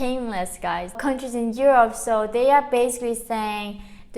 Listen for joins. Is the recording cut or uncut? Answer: cut